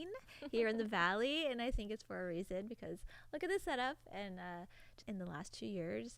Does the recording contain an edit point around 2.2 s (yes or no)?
no